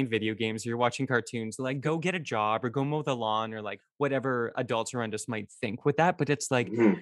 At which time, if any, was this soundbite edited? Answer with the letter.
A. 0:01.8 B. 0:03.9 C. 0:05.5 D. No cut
A